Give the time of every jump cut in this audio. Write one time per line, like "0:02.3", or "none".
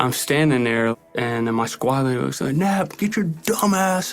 0:00.9